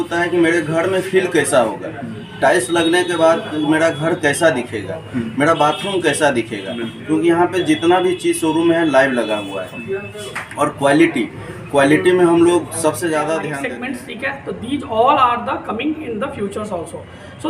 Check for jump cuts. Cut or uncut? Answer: cut